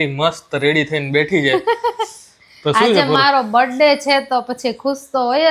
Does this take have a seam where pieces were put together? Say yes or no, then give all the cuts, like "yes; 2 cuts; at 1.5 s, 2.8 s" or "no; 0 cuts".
no; 0 cuts